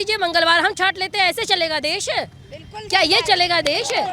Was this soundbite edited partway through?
no; 0 cuts

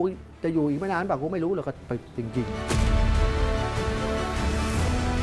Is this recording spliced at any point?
no; 0 cuts

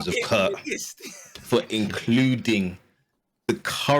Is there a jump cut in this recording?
no; 0 cuts

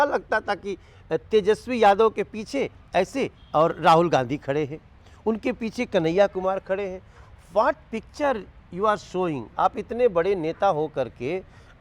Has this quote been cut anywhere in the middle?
no; 0 cuts

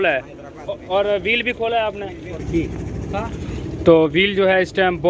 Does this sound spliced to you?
yes; 2 cuts; at 0.8 s, 2.4 s

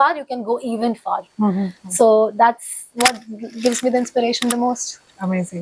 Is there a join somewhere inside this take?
no; 0 cuts

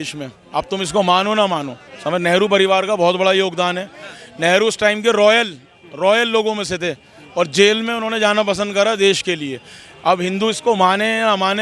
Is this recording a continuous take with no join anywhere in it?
yes; 0 cuts

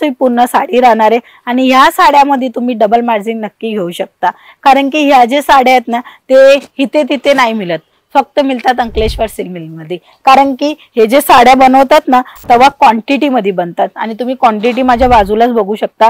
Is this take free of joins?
yes; 0 cuts

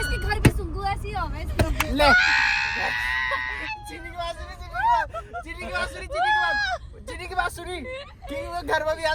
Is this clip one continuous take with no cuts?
yes; 0 cuts

